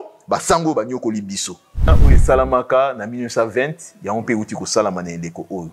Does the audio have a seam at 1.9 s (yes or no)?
yes